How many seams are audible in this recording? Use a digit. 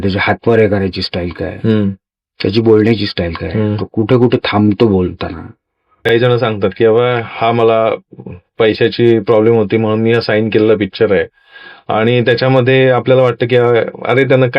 1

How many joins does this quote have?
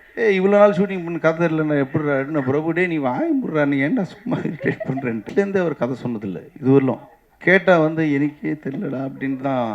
1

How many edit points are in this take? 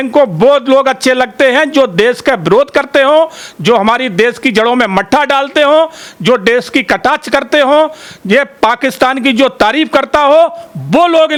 0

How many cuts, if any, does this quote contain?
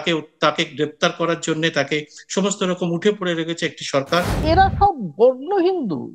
1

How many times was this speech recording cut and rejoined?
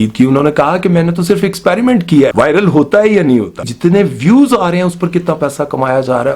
2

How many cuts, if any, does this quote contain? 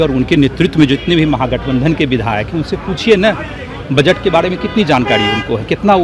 0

